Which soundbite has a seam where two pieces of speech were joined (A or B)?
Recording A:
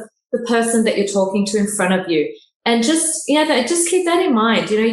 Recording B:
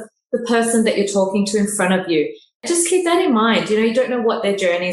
B